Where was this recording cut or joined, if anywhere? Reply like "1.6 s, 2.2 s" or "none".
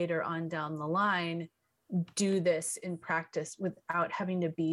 none